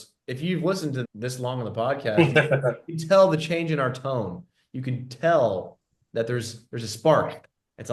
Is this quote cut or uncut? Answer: cut